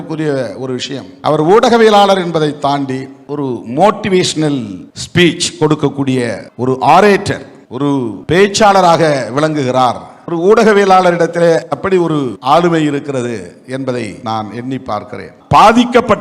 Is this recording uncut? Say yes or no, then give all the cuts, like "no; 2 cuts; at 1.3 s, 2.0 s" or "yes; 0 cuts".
no; 1 cut; at 15.3 s